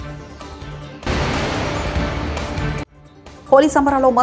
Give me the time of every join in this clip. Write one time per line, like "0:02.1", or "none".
0:01.1